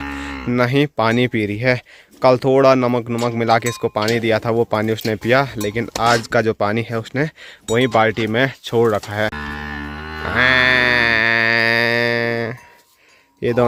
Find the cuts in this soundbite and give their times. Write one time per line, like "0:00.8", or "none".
none